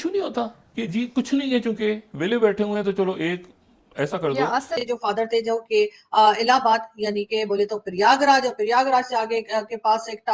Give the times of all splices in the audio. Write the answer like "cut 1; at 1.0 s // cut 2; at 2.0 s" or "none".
cut 1; at 4.7 s